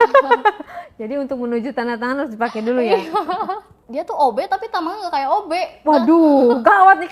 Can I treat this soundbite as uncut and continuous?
no; 1 cut; at 3.8 s

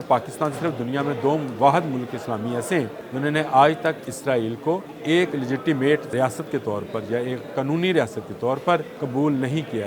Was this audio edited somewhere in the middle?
yes; 4 cuts; at 3.0 s, 4.9 s, 6.1 s, 9.0 s

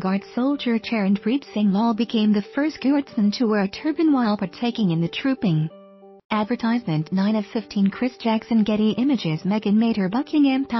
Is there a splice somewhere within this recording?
no; 0 cuts

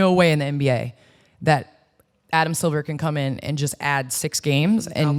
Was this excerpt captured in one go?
yes; 0 cuts

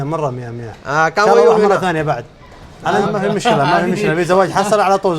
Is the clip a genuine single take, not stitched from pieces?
no; 1 cut; at 3.0 s

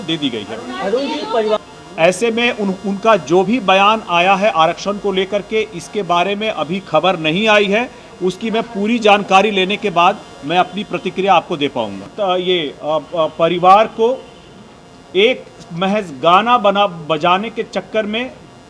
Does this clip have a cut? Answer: yes; 2 cuts; at 1.6 s, 12.0 s

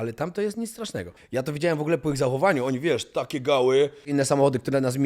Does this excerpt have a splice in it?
yes; 2 cuts; at 1.1 s, 4.1 s

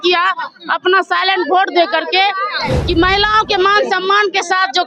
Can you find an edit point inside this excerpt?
no; 0 cuts

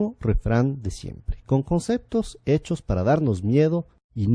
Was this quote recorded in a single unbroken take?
no; 1 cut; at 2.2 s

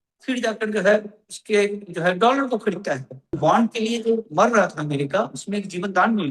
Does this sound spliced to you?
yes; 1 cut; at 3.4 s

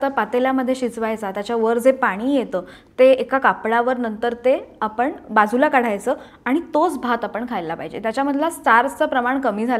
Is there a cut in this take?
no; 0 cuts

